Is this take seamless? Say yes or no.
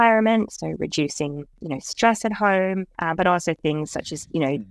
no